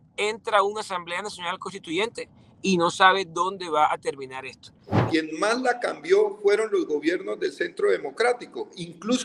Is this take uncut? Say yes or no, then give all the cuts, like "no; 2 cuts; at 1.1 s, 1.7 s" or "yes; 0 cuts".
no; 1 cut; at 4.9 s